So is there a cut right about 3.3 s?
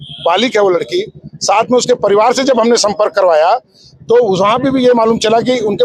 no; 0 cuts

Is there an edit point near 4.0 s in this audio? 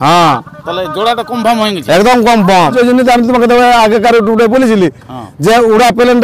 no; 1 cut; at 2.7 s

